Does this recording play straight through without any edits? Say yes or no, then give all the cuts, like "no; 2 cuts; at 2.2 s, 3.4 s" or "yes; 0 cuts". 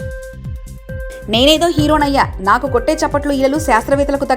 no; 1 cut; at 0.9 s